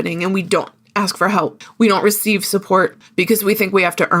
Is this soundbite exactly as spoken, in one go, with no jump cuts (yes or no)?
no